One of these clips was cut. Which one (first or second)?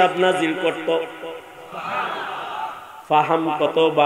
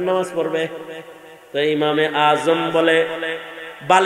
first